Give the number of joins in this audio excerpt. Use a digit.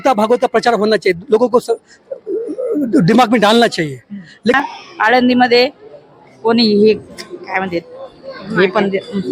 1